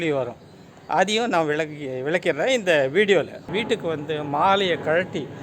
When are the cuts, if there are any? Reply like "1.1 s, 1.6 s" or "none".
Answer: 3.5 s